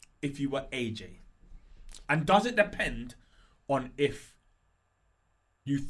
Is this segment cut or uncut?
uncut